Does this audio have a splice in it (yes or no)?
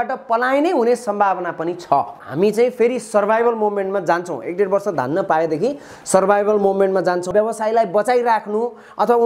yes